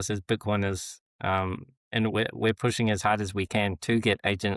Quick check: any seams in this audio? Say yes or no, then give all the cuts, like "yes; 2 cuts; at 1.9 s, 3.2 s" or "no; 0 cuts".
no; 0 cuts